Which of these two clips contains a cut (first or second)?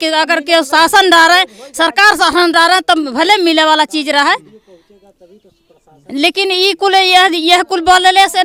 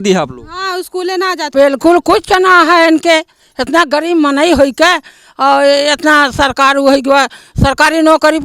second